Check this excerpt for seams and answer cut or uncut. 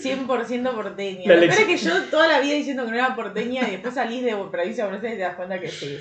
uncut